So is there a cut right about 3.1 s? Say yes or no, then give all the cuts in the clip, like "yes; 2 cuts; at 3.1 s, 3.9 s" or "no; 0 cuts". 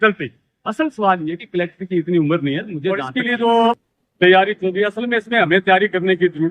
yes; 1 cut; at 3.1 s